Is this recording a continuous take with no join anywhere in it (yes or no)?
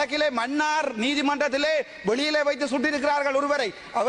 yes